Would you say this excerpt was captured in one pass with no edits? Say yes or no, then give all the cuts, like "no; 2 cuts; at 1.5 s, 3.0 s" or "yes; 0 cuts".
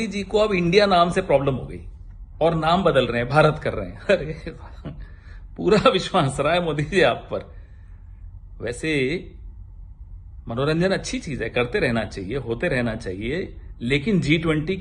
yes; 0 cuts